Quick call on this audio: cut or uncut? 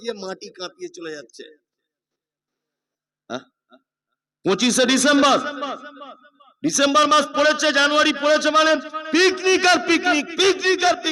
uncut